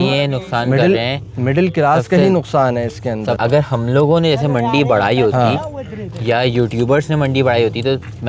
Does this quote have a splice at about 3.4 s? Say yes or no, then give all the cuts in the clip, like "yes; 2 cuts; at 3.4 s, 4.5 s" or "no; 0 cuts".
yes; 1 cut; at 3.4 s